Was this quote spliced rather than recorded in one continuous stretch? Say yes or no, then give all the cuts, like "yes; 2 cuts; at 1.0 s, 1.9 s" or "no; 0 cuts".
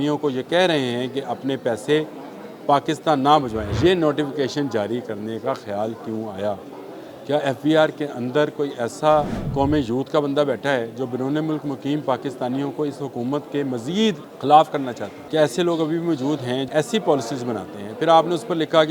yes; 5 cuts; at 3.7 s, 9.4 s, 14.3 s, 15.1 s, 16.7 s